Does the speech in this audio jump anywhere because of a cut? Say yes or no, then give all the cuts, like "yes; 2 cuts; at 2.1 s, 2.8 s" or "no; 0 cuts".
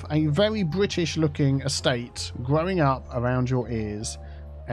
no; 0 cuts